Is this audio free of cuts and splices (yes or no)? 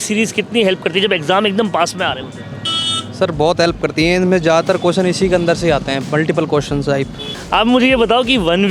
no